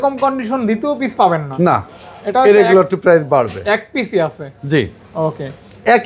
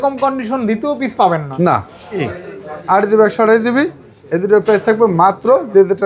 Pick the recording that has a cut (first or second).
second